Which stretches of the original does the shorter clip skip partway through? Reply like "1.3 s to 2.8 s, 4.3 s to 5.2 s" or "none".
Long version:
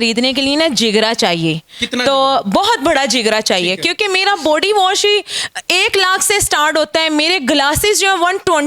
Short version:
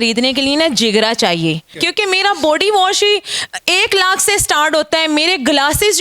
1.8 s to 3.8 s